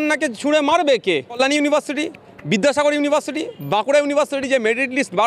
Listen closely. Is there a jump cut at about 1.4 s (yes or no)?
yes